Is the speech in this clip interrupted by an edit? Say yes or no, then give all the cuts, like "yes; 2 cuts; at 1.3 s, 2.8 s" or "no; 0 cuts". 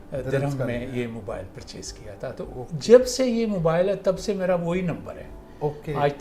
no; 0 cuts